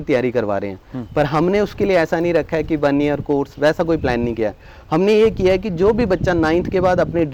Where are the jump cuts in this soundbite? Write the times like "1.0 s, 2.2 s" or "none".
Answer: none